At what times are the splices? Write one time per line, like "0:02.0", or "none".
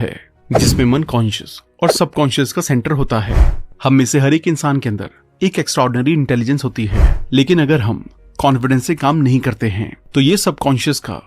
0:03.4